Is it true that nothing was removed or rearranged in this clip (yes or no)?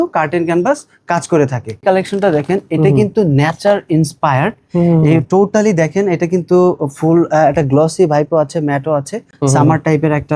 no